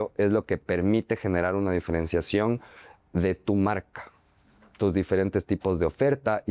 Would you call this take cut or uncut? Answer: uncut